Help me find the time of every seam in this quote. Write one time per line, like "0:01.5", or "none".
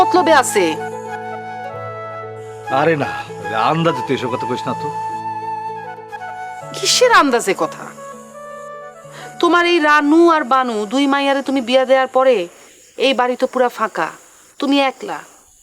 none